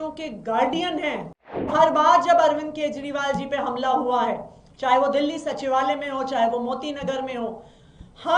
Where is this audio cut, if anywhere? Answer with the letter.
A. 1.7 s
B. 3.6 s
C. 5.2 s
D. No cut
A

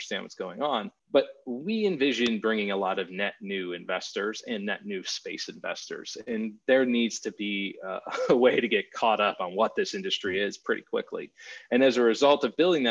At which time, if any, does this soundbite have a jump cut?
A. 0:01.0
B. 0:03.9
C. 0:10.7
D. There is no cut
A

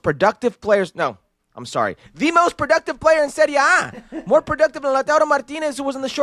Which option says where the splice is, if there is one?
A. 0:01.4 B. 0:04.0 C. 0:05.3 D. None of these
D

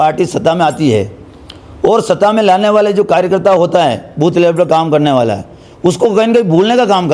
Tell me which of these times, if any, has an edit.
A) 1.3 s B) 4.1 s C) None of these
C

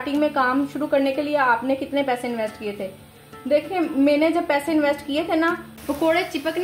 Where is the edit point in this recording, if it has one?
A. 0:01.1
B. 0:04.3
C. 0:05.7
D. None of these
C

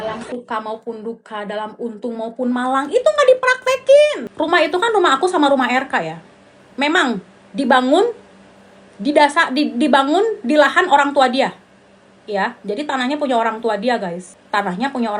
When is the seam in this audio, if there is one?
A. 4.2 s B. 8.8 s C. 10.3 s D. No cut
A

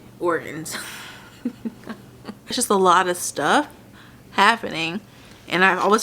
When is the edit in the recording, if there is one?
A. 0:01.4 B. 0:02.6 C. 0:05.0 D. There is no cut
B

